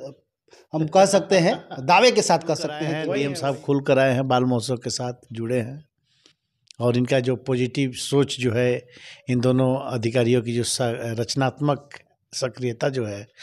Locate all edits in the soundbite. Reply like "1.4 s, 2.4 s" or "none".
3.0 s